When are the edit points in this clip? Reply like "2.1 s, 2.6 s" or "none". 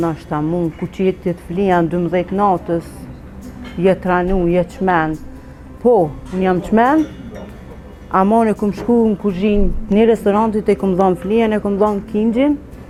none